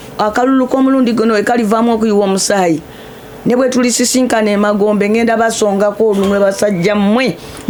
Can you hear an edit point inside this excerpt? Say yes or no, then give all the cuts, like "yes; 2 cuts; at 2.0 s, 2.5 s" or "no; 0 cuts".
no; 0 cuts